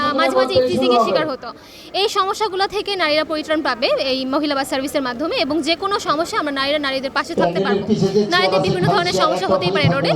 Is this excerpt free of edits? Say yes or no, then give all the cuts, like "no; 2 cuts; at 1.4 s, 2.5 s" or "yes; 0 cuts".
yes; 0 cuts